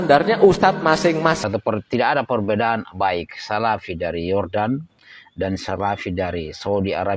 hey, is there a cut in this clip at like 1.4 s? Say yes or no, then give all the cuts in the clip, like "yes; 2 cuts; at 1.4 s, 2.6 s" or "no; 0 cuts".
yes; 1 cut; at 1.4 s